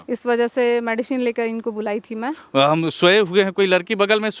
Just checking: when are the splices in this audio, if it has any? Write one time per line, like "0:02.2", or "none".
0:02.4